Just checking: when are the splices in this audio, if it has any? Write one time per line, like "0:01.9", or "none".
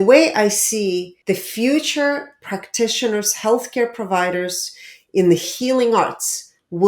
0:01.1